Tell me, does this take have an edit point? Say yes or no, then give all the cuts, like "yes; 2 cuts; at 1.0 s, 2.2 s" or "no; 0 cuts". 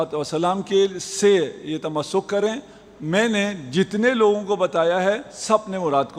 no; 0 cuts